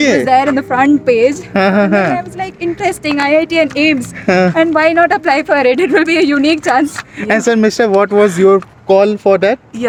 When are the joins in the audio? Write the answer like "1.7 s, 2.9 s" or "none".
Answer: none